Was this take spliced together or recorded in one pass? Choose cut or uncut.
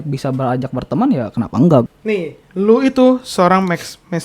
cut